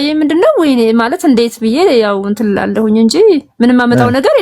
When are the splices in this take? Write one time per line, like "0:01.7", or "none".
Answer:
none